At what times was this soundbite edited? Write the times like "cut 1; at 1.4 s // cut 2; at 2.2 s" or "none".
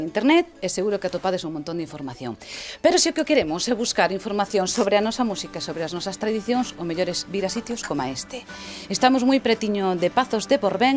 cut 1; at 9.3 s